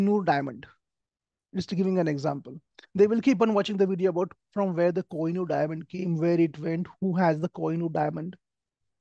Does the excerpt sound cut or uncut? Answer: uncut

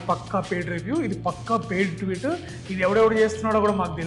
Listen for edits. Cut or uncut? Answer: uncut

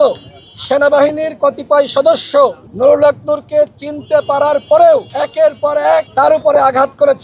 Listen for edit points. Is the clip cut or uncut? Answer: cut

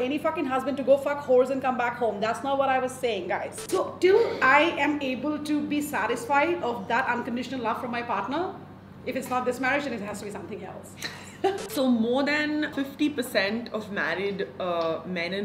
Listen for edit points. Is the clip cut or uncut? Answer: cut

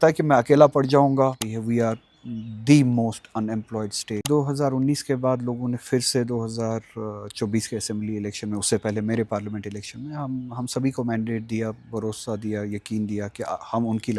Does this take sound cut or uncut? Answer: uncut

